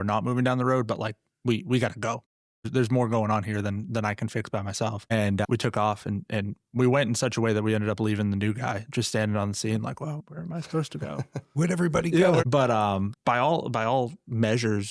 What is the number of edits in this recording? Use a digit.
1